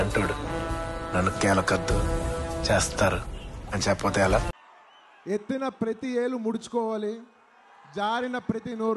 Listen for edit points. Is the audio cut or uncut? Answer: cut